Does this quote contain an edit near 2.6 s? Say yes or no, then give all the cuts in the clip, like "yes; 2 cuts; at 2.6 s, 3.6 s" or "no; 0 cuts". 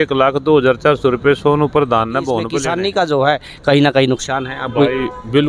yes; 1 cut; at 2.6 s